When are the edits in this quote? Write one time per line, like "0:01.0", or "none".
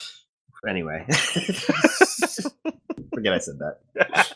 0:01.6